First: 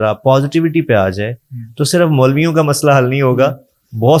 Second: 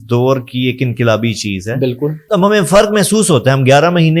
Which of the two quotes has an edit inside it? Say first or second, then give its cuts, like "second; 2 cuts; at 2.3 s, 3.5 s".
second; 1 cut; at 2.2 s